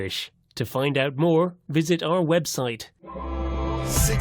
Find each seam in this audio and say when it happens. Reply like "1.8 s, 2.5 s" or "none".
3.0 s

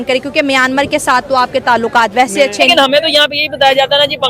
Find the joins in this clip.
2.7 s

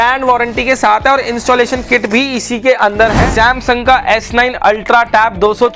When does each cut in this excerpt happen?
3.2 s

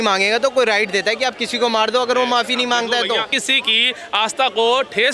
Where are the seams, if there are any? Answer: 3.4 s

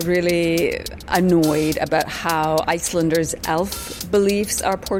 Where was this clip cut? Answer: none

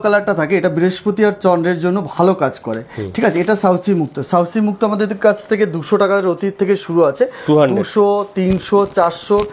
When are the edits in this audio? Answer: none

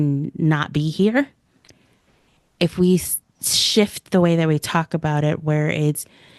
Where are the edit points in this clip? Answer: none

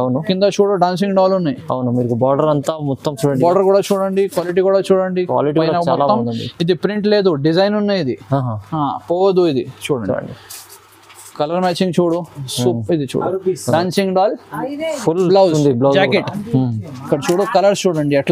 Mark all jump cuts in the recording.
none

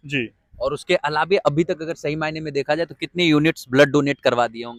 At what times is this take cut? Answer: none

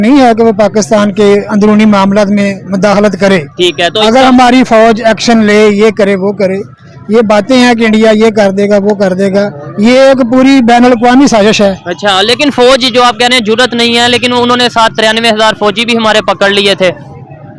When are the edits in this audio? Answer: none

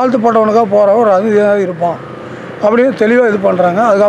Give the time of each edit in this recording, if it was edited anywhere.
none

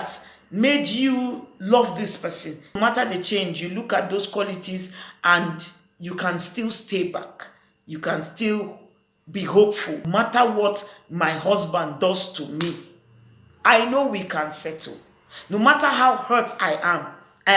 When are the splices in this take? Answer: 2.8 s, 10.0 s

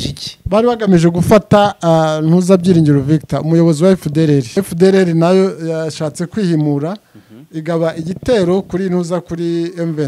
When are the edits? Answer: 4.5 s

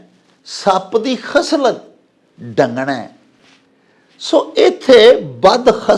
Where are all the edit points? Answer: none

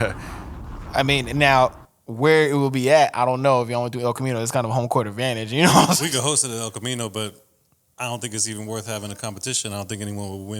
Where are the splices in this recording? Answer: none

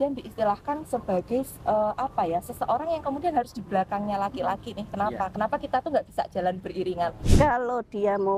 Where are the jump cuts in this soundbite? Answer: 7.2 s

